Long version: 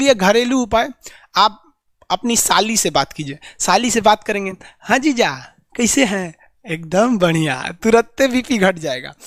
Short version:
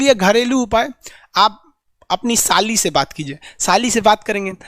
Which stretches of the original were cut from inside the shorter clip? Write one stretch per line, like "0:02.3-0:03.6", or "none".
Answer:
none